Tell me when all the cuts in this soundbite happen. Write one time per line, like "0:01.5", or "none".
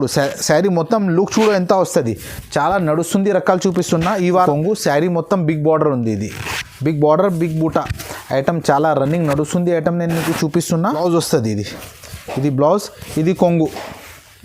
0:04.5
0:10.9

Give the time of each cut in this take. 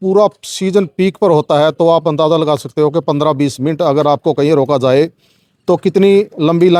none

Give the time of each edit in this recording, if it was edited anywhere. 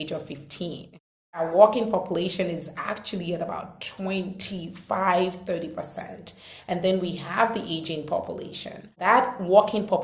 0:01.4
0:09.0

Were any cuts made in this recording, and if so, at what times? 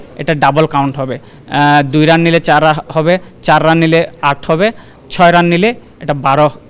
none

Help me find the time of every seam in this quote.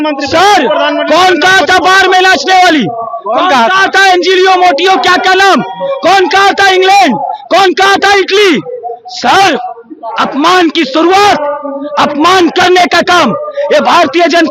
none

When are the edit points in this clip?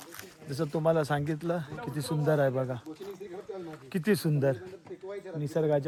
none

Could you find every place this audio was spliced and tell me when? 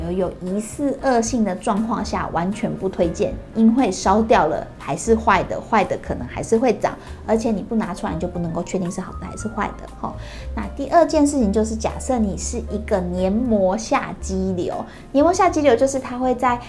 none

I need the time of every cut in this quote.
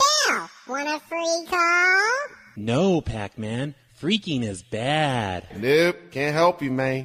none

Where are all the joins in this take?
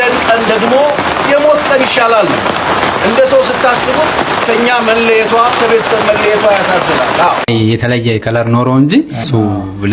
0:07.5

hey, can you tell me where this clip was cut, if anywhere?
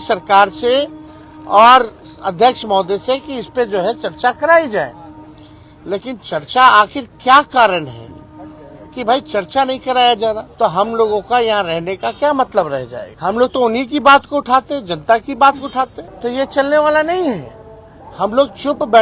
0:10.5
0:13.0
0:16.0

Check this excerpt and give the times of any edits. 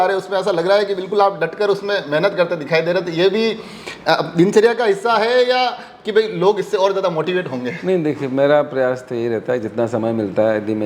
none

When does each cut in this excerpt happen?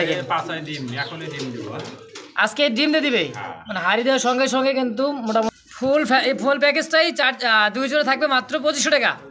0:05.5

